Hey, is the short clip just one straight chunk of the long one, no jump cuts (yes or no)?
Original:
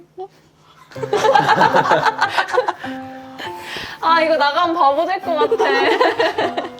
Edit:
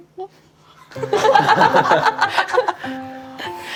yes